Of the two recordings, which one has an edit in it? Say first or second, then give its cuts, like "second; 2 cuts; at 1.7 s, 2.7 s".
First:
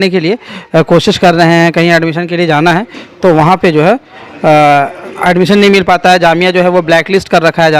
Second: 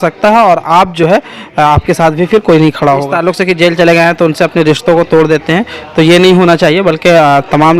second; 1 cut; at 3.1 s